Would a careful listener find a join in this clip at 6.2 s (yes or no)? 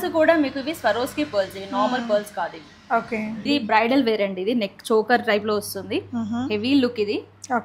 no